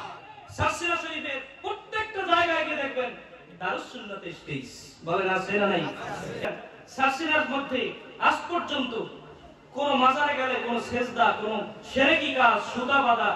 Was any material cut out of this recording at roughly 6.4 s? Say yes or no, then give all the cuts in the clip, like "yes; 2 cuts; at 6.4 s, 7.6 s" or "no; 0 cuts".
yes; 1 cut; at 6.4 s